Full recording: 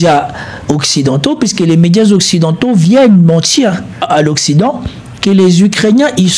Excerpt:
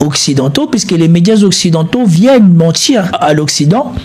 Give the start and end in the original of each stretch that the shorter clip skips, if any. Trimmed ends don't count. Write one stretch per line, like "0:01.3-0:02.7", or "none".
0:03.8-0:04.0